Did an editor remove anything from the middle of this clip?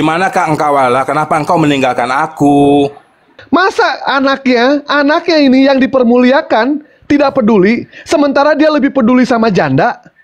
yes; 1 cut; at 3.3 s

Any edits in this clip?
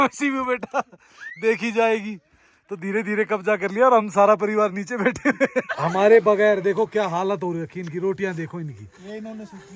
yes; 1 cut; at 5.7 s

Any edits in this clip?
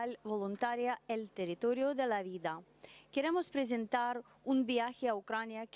no; 0 cuts

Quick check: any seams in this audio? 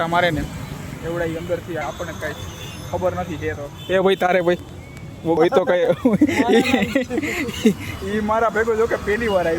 yes; 2 cuts; at 1.8 s, 5.4 s

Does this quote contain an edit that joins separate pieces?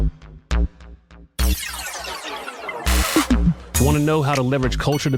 no; 0 cuts

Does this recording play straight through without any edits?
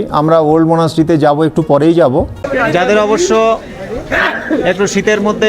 no; 1 cut; at 2.4 s

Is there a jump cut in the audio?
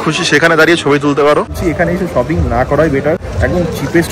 yes; 2 cuts; at 1.6 s, 3.3 s

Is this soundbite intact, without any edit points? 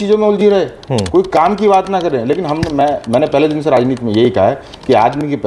yes; 0 cuts

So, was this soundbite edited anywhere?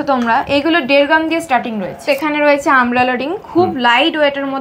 yes; 1 cut; at 2.0 s

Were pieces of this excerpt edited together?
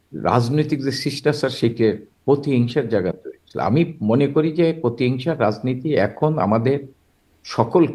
no; 0 cuts

